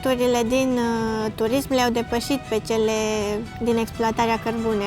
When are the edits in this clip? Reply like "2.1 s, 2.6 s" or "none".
3.5 s